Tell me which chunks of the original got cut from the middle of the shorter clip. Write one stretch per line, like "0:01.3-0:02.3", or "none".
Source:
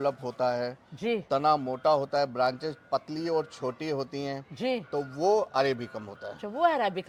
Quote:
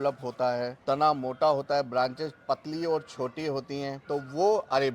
0:00.8-0:01.2
0:04.5-0:04.9